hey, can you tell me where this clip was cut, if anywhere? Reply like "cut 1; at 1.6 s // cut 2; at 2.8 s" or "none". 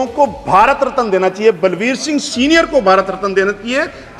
none

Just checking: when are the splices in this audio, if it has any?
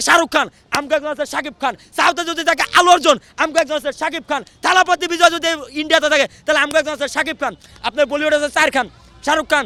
none

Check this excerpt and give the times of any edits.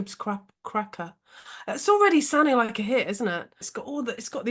cut 1; at 3.6 s

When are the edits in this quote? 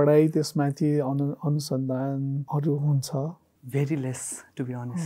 cut 1; at 2.5 s

